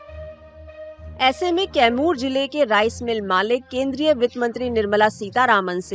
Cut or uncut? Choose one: cut